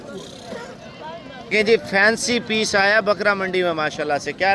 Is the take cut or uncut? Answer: cut